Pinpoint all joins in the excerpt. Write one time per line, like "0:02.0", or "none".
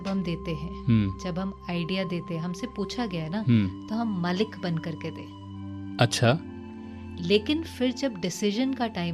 none